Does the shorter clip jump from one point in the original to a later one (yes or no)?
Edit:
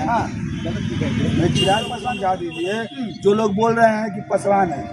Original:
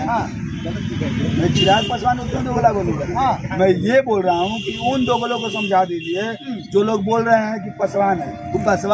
yes